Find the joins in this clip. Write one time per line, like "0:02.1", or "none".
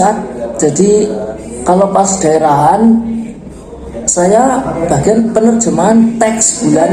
none